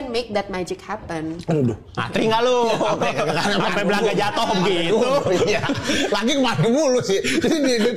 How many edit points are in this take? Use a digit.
0